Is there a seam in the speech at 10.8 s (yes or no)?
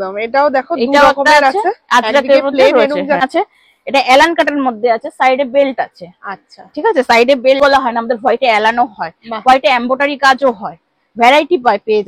no